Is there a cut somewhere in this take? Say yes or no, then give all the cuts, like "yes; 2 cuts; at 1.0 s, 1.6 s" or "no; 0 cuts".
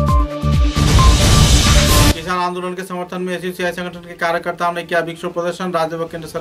yes; 1 cut; at 2.2 s